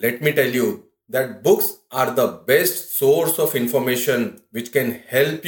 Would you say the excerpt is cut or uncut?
cut